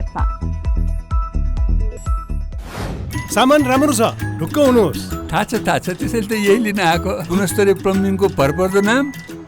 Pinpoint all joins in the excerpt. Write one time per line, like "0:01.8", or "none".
0:03.1